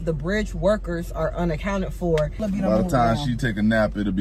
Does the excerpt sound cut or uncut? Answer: cut